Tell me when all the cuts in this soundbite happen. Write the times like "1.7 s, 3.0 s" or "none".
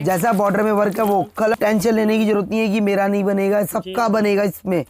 1.5 s